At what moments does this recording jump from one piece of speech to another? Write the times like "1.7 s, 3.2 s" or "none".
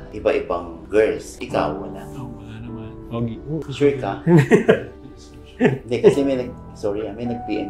1.3 s, 3.6 s